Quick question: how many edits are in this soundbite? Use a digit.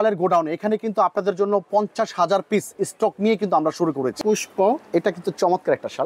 1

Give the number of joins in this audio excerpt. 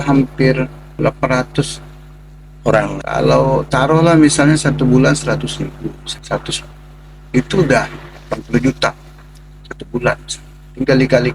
3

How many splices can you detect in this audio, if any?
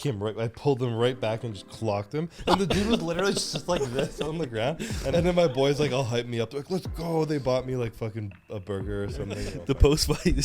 3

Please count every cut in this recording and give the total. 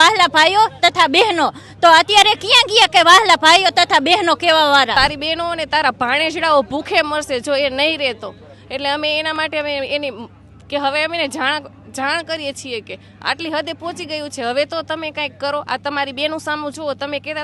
1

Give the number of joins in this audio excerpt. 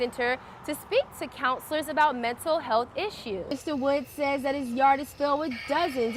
1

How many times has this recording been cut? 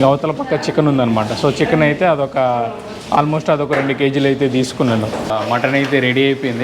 1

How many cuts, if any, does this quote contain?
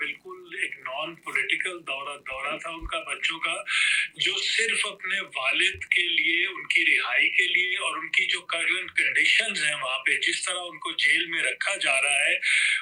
0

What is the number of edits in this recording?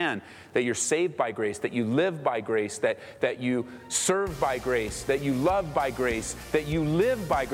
0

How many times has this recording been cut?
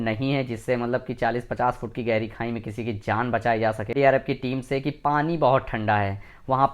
1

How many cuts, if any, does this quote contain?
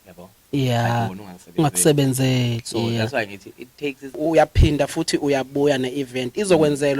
1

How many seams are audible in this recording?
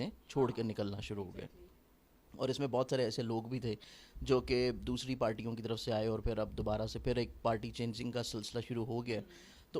0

